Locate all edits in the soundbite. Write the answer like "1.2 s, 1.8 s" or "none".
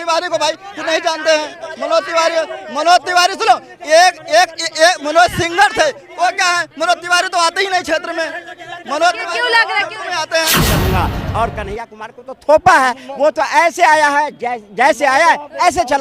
10.7 s